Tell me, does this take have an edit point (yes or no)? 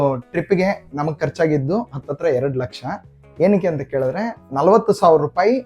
no